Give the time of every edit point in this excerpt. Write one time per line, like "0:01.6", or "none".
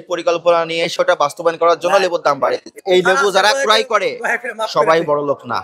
0:02.7